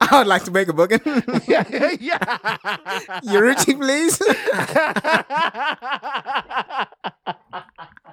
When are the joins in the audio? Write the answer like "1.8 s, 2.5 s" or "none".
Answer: 5.5 s